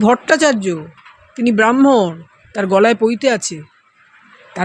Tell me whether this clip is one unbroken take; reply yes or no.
yes